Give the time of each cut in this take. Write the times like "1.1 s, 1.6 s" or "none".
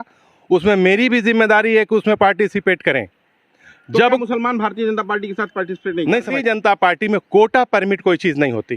6.3 s